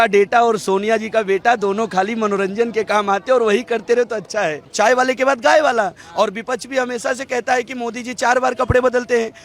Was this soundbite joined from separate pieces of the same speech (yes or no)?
yes